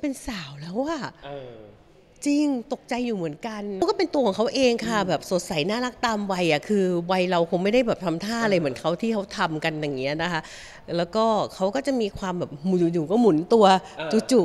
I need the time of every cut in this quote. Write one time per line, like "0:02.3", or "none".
0:03.8